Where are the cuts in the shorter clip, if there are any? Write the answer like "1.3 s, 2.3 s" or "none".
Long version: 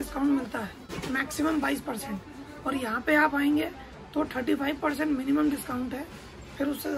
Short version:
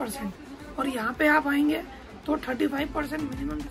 none